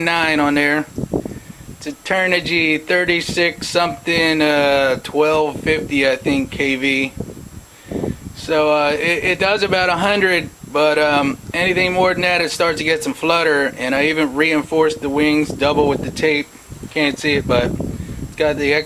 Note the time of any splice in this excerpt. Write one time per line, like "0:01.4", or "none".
none